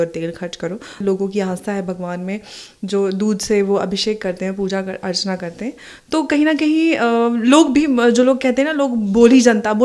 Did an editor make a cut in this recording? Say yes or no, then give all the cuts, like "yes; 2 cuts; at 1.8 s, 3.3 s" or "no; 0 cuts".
yes; 1 cut; at 1.0 s